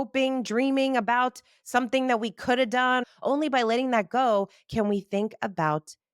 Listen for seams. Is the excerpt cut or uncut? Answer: cut